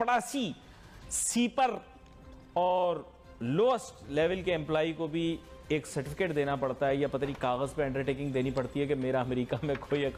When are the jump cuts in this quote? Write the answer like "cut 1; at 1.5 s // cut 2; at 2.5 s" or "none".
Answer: none